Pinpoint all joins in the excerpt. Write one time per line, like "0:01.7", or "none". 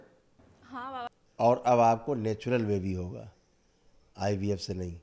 0:01.1